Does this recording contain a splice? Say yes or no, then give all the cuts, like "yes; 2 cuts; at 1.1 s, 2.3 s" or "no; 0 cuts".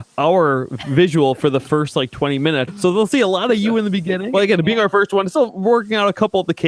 yes; 2 cuts; at 2.7 s, 4.3 s